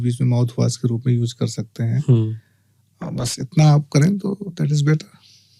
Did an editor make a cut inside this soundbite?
no; 0 cuts

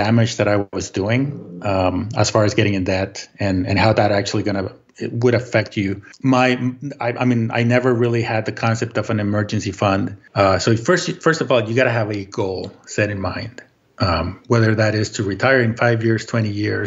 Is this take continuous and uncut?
no; 1 cut; at 10.2 s

